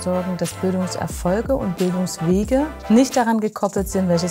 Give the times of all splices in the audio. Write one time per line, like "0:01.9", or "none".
none